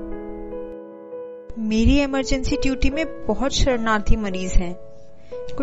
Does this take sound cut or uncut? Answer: cut